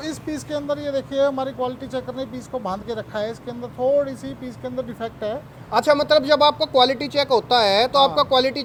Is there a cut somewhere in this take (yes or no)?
no